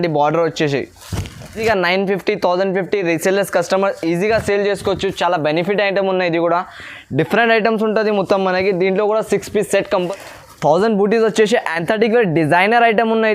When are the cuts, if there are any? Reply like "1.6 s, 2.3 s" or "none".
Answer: 1.6 s, 10.1 s